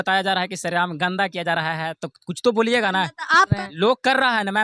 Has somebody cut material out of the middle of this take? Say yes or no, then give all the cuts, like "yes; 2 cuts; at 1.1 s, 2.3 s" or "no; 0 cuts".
yes; 1 cut; at 3.5 s